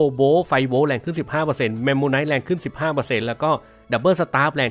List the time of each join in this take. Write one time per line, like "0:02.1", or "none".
none